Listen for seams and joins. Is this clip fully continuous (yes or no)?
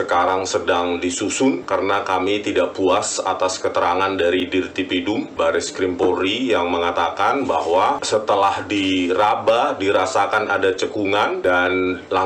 no